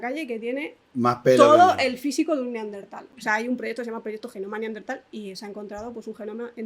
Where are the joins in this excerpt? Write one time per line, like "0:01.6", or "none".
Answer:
0:03.1